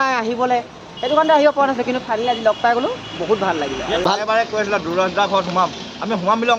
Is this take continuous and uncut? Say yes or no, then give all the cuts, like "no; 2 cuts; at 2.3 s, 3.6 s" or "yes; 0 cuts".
no; 1 cut; at 4.0 s